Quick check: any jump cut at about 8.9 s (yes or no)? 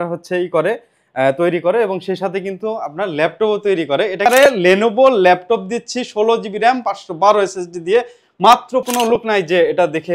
yes